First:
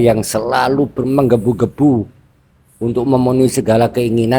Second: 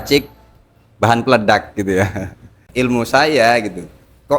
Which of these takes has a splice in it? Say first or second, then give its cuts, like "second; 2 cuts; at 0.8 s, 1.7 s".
second; 1 cut; at 2.6 s